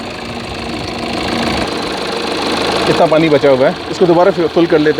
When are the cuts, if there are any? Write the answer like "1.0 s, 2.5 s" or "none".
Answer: 1.6 s